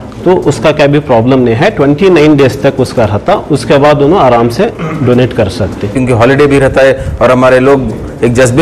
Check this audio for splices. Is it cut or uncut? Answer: cut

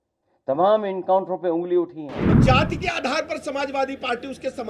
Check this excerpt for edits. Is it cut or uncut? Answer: cut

